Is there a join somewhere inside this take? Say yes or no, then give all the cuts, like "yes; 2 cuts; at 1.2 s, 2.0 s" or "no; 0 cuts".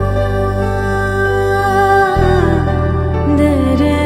yes; 1 cut; at 2.4 s